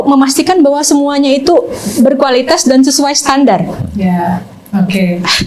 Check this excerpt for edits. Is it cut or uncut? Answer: uncut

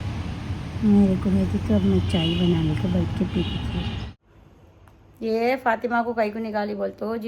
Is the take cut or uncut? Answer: cut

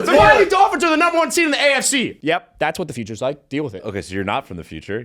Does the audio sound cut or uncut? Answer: cut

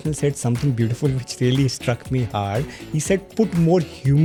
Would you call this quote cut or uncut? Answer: uncut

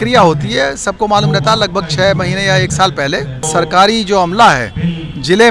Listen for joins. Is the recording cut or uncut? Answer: cut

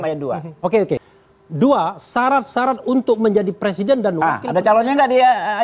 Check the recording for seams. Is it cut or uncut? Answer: cut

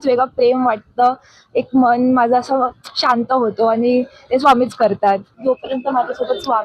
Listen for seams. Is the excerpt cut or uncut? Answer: cut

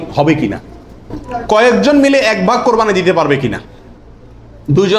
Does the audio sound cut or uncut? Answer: cut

